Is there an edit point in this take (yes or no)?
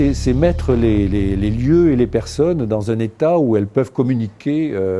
yes